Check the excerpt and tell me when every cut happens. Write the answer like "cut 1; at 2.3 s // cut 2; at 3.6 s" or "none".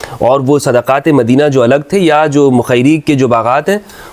none